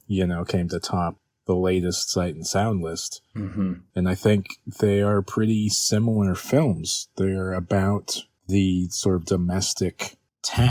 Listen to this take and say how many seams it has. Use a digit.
1